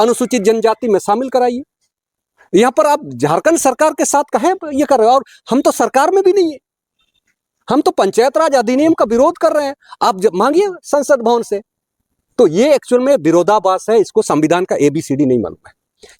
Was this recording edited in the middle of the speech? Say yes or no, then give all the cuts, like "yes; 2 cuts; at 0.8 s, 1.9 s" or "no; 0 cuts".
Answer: no; 0 cuts